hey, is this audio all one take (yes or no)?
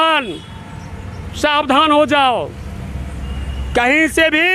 yes